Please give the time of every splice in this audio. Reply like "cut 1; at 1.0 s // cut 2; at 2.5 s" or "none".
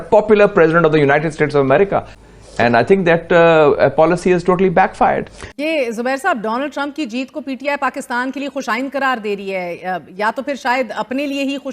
cut 1; at 2.1 s // cut 2; at 5.4 s